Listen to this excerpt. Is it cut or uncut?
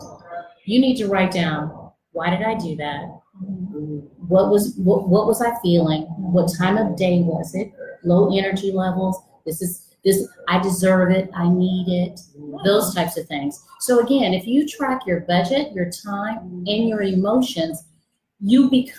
uncut